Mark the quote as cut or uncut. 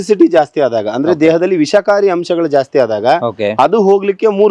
uncut